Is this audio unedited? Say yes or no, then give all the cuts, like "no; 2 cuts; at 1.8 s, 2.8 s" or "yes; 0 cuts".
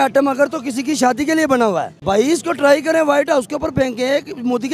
no; 1 cut; at 1.9 s